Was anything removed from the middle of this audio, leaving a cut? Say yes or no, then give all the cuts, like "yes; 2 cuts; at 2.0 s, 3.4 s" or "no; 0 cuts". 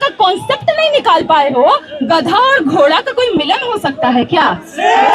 yes; 1 cut; at 1.9 s